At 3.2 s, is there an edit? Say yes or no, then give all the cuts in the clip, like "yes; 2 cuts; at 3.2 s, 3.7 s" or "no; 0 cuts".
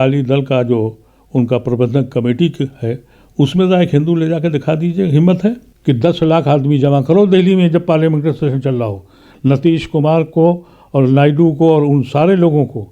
no; 1 cut; at 5.7 s